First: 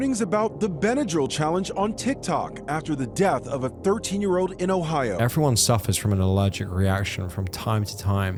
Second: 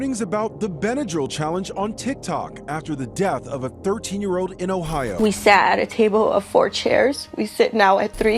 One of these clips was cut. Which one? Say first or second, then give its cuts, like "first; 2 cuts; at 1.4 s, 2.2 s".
second; 1 cut; at 5.1 s